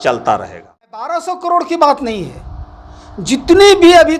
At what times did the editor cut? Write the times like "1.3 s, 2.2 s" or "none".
1.1 s

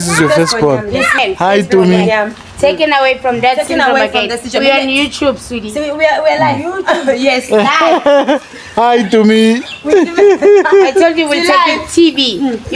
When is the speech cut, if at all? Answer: 1.2 s

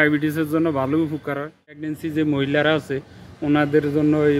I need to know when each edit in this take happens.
1.7 s

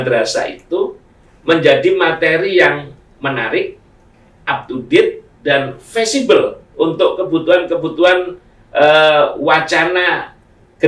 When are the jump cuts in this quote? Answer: none

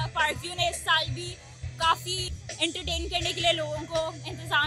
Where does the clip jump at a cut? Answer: 2.2 s

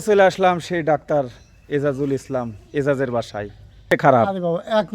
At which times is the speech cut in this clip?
3.9 s

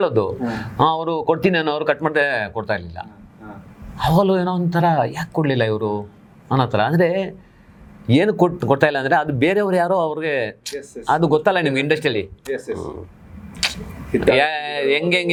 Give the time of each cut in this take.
none

